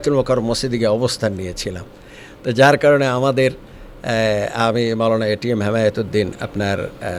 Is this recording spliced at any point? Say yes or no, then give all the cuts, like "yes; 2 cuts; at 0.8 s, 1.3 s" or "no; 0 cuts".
no; 0 cuts